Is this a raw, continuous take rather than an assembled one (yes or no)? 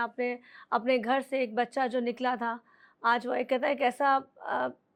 yes